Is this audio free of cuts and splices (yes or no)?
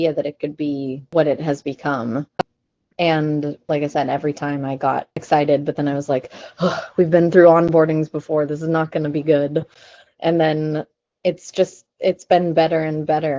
yes